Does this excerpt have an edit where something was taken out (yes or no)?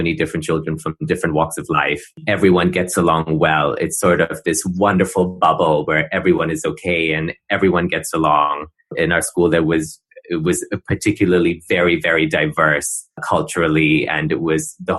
no